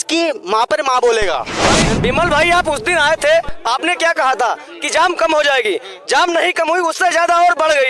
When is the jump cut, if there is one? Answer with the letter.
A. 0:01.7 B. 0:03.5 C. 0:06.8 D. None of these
A